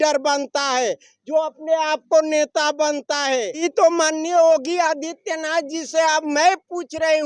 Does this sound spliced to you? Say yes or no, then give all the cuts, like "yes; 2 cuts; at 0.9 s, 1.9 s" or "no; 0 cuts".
yes; 1 cut; at 3.7 s